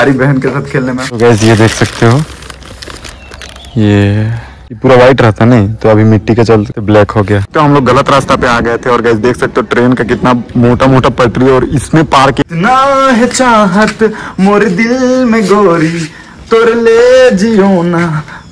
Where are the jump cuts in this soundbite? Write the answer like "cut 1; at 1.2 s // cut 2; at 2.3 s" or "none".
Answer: cut 1; at 1.2 s // cut 2; at 4.8 s // cut 3; at 7.5 s // cut 4; at 12.4 s

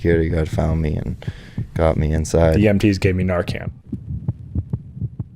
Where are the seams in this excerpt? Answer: cut 1; at 3.6 s

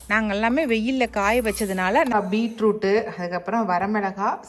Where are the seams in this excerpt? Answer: cut 1; at 2.1 s

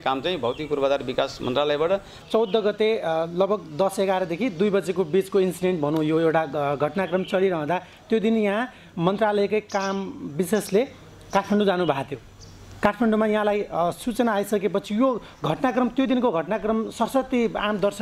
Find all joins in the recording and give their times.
cut 1; at 2.2 s

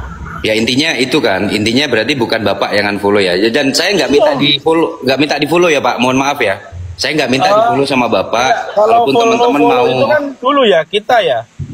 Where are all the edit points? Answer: none

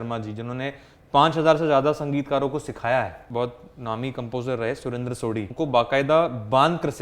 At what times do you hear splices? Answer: cut 1; at 3.2 s // cut 2; at 5.5 s

